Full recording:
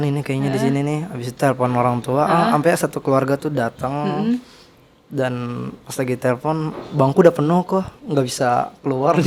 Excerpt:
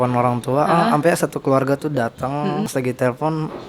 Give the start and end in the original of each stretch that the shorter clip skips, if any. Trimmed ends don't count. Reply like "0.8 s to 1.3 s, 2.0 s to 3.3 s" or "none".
4.3 s to 5.9 s